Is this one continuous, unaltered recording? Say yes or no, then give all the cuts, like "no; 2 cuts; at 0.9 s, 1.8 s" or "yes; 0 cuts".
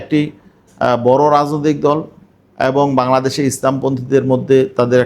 yes; 0 cuts